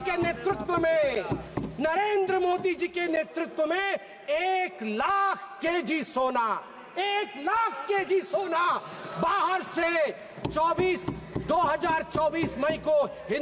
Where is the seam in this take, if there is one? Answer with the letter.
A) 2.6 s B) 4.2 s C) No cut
C